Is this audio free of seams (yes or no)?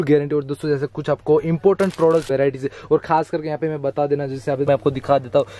no